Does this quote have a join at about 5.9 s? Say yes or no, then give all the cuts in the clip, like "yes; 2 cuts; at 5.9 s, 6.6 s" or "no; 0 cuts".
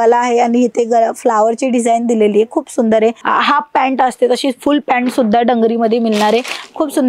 no; 1 cut; at 3.2 s